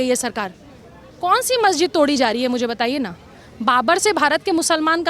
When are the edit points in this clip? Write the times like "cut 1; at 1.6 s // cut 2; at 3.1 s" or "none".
none